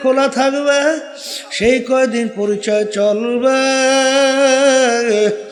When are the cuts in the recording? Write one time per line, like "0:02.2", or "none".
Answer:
none